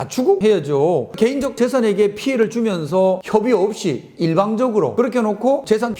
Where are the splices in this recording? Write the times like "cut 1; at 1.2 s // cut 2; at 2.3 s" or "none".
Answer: none